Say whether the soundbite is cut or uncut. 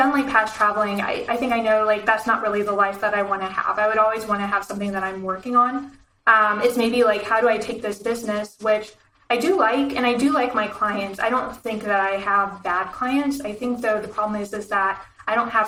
uncut